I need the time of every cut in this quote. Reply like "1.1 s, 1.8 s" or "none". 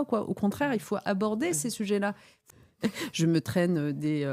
2.4 s